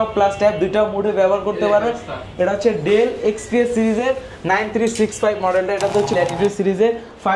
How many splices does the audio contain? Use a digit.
1